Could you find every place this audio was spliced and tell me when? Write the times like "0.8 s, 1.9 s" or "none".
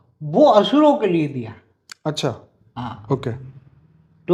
none